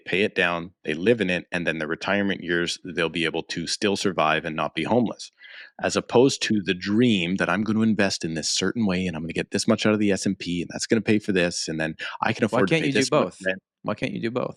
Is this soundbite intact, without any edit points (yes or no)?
yes